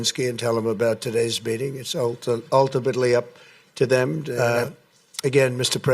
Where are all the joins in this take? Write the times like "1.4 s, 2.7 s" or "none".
4.3 s